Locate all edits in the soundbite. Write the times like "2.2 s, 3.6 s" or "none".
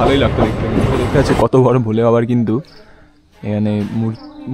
1.1 s